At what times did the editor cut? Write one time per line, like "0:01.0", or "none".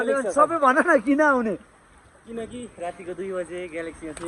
none